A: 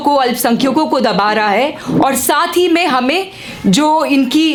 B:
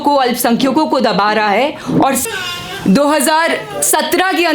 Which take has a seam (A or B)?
B